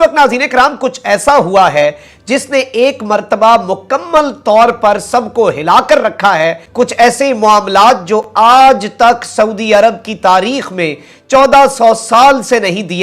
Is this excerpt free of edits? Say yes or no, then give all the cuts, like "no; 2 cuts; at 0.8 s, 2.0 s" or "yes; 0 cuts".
no; 1 cut; at 6.6 s